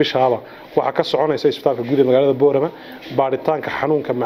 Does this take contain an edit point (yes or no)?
no